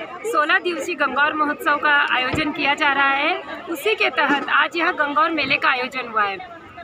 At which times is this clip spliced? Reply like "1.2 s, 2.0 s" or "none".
none